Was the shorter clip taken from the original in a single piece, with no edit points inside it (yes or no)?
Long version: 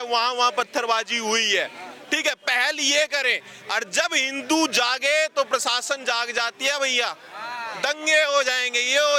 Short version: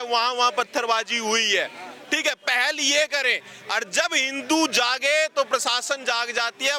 yes